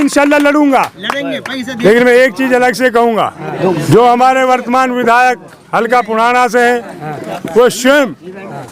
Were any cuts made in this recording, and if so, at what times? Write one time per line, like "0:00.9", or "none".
0:01.6
0:03.5